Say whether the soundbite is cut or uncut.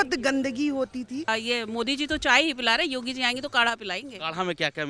cut